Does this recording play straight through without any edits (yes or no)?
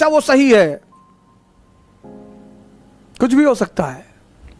yes